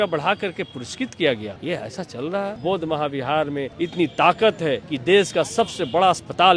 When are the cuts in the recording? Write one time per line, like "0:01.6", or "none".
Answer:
0:01.5
0:02.6
0:03.7
0:04.9

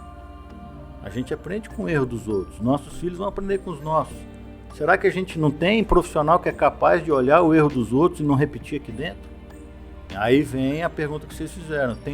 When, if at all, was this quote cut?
0:10.2

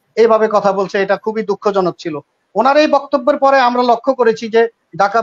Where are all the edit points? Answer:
none

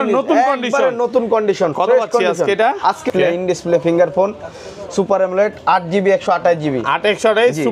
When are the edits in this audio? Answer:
0:03.1

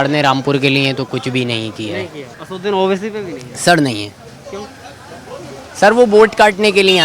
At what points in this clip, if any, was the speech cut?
0:02.3

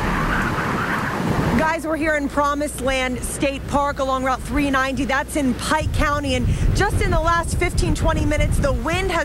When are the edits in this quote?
none

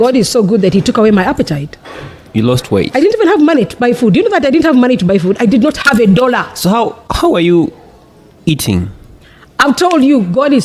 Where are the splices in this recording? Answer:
none

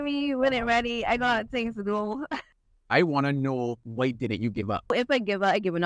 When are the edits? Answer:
0:02.6
0:03.8
0:04.9

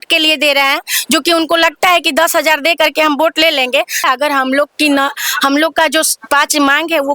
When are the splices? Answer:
0:04.0

